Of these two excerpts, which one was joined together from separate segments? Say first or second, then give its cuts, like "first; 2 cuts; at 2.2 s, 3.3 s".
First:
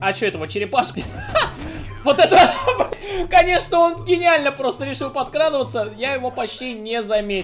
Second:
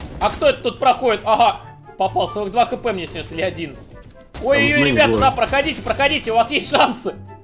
first; 2 cuts; at 0.9 s, 2.9 s